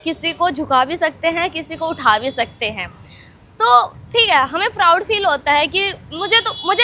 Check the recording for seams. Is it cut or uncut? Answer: uncut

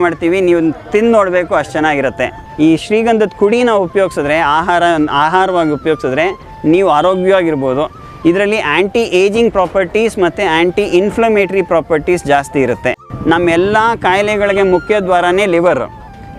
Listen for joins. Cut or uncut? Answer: cut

